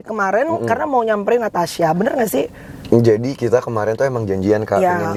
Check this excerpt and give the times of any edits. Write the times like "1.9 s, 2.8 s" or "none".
none